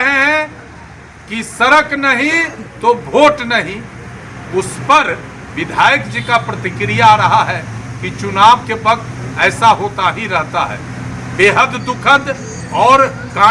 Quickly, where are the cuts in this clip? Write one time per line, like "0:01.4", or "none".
none

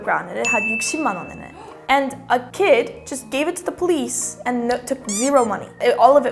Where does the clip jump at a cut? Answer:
none

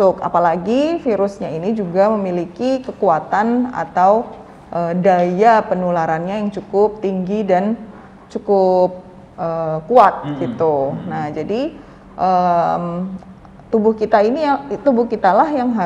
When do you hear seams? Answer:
none

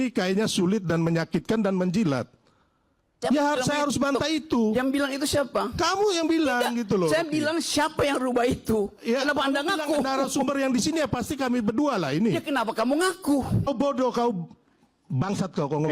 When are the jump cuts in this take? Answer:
0:13.7

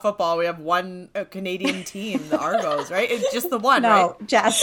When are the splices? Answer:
0:01.0

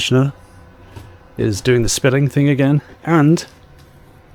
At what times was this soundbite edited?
none

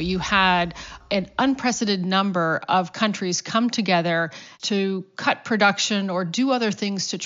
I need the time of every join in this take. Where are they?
0:01.0
0:04.5

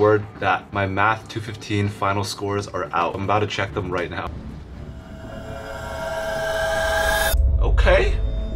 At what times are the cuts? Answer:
0:03.2
0:04.3

